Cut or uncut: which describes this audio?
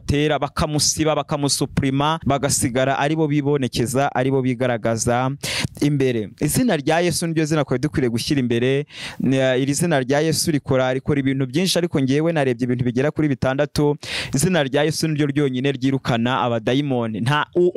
uncut